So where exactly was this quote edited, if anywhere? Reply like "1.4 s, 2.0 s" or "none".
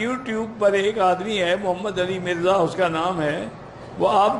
none